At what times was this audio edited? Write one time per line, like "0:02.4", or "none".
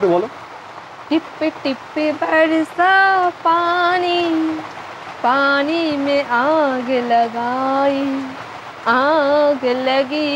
none